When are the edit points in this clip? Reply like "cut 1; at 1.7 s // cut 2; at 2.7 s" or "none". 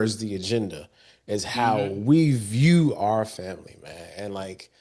none